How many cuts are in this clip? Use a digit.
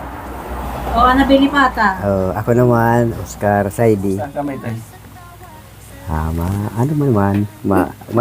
1